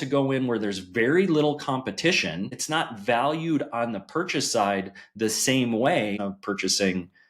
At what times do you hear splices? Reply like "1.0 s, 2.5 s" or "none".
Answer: 2.6 s, 6.2 s

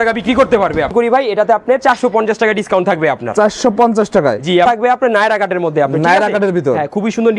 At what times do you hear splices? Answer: 0.9 s, 4.7 s

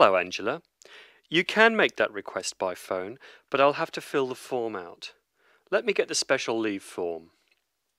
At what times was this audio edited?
none

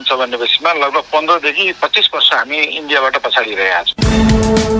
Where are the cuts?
3.9 s

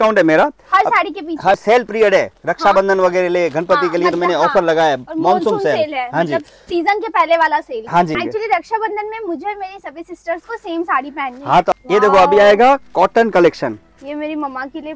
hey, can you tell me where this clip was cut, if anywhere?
1.6 s, 8.2 s, 11.7 s

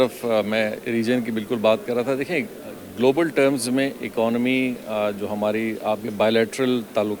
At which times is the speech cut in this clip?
none

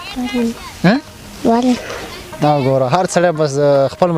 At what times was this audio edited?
none

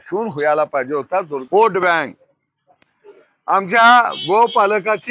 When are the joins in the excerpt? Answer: 1.4 s

